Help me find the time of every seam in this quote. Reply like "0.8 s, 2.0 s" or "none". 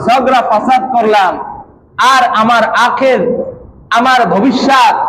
none